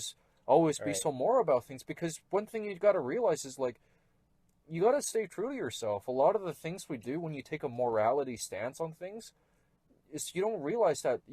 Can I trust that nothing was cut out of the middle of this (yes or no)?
yes